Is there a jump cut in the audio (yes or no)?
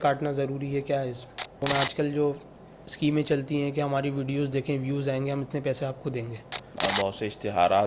yes